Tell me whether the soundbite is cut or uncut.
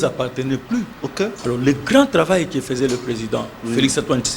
cut